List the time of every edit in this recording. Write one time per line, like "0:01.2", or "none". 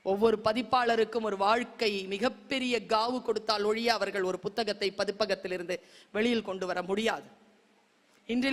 none